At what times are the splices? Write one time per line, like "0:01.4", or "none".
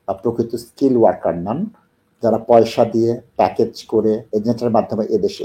0:04.2